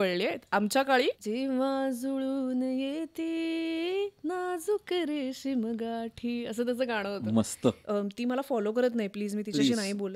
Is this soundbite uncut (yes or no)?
no